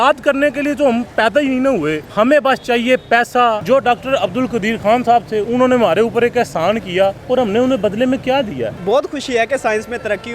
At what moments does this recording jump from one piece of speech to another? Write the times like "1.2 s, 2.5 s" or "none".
2.0 s, 3.6 s, 7.2 s, 8.7 s

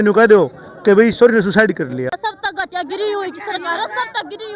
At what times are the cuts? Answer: 2.2 s

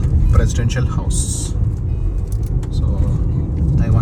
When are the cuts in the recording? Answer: none

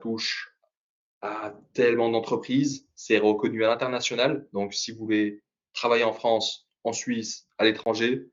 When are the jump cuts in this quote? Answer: none

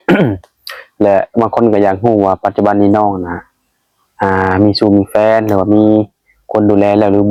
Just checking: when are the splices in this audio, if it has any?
none

